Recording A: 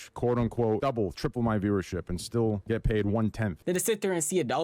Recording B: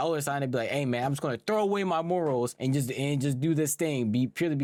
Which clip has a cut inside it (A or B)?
A